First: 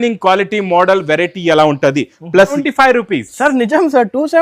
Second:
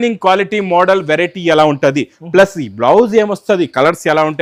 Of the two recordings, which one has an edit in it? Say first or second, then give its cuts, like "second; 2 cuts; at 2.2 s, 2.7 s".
first; 1 cut; at 2.6 s